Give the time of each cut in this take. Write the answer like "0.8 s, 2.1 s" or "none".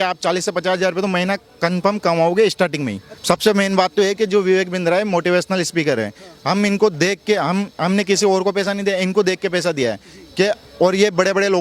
3.1 s

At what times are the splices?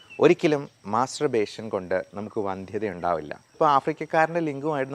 3.5 s

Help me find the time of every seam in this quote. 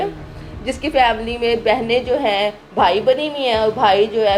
none

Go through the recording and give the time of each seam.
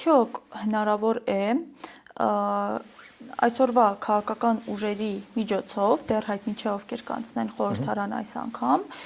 none

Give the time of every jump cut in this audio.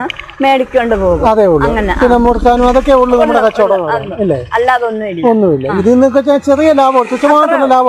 none

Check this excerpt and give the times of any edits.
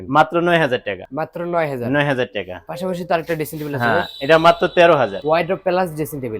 none

